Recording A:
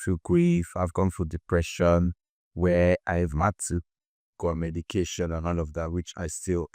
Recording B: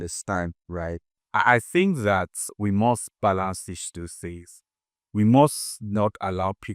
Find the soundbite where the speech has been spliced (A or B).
B